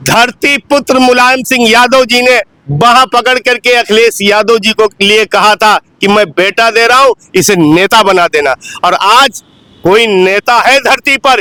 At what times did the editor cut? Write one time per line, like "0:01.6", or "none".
none